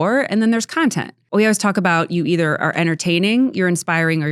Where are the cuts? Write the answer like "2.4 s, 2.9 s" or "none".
1.1 s